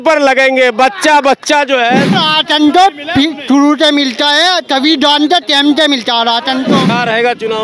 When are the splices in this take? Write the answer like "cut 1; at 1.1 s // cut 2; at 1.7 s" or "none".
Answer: cut 1; at 2.1 s // cut 2; at 6.9 s